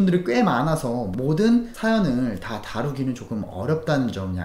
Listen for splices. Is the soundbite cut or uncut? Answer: cut